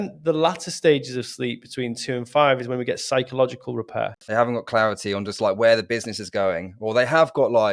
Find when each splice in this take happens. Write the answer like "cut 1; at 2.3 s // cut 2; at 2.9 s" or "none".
cut 1; at 4.2 s